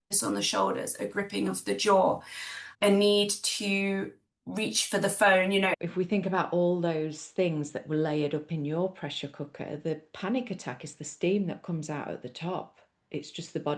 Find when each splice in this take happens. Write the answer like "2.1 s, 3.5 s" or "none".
5.7 s